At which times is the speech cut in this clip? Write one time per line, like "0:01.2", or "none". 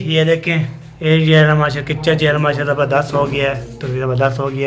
none